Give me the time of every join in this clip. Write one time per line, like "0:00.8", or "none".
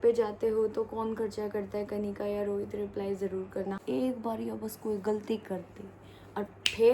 0:03.8